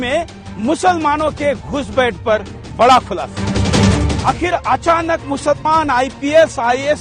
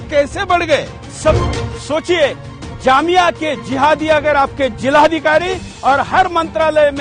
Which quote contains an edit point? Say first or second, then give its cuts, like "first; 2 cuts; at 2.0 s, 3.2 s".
second; 1 cut; at 1.4 s